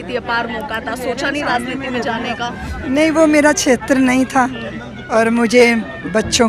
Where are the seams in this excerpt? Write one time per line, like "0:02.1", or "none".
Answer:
0:02.7

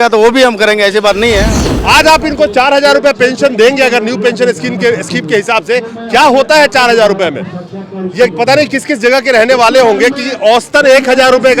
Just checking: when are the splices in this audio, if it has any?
0:01.6

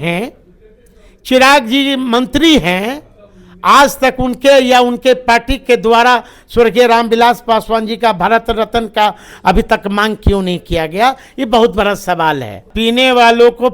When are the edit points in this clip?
0:12.7

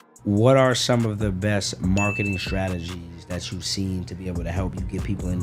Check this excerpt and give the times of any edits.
none

